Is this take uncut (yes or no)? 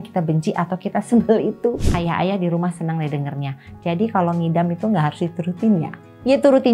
no